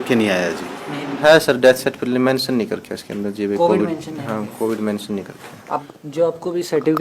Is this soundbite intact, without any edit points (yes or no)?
no